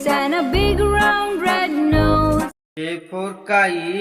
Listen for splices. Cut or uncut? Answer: cut